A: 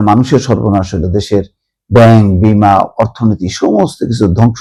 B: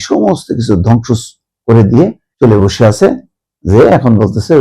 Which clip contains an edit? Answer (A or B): B